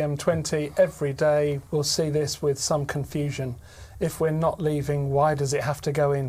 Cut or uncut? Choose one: cut